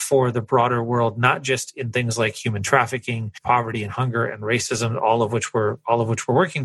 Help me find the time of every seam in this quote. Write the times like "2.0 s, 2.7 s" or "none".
3.3 s